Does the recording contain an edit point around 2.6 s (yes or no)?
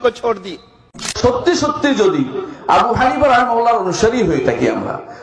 no